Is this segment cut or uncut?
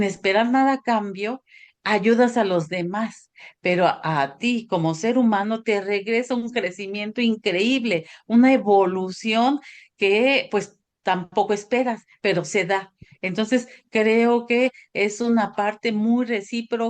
uncut